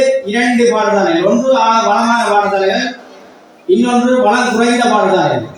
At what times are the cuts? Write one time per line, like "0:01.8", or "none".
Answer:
none